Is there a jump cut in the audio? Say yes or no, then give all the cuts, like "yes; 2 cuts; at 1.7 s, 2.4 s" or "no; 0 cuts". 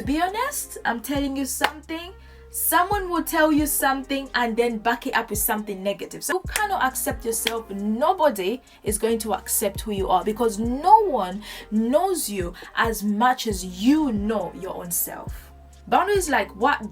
yes; 2 cuts; at 6.3 s, 15.7 s